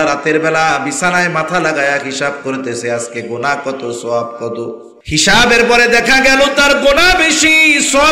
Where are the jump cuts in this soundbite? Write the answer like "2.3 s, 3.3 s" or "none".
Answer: 4.9 s